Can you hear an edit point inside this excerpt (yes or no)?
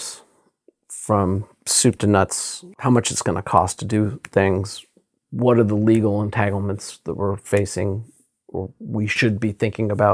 yes